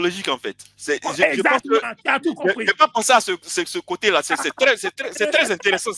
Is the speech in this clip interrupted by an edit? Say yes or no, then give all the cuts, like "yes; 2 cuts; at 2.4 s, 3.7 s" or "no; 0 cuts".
no; 0 cuts